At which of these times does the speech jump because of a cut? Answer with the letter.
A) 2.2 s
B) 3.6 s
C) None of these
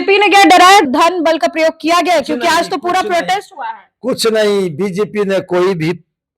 C